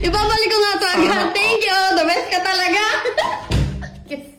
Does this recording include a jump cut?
no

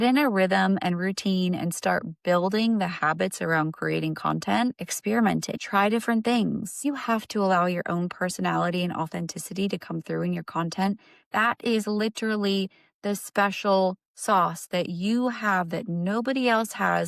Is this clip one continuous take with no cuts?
yes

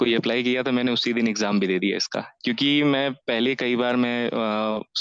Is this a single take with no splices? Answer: yes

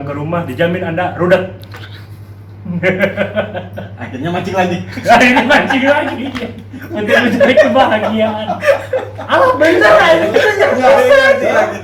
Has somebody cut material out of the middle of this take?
no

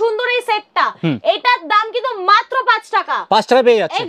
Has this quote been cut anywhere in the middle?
no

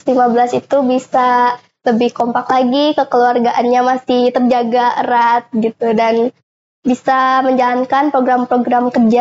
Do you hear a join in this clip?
no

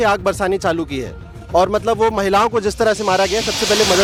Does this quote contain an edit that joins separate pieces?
no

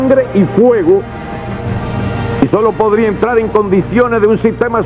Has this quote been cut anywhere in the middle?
no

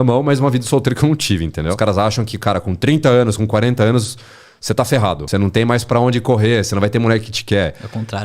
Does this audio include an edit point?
yes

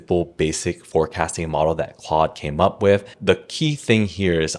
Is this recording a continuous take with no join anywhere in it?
no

